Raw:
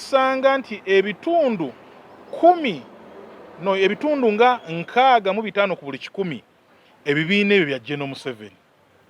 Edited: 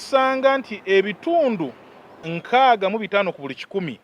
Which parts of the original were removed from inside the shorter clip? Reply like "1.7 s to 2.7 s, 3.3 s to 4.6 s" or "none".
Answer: 2.2 s to 4.7 s